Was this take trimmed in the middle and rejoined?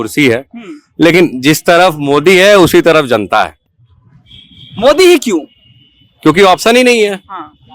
no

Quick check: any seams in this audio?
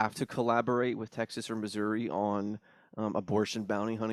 no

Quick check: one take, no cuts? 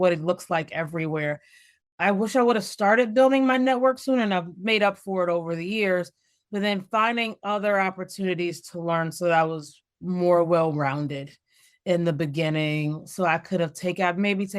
yes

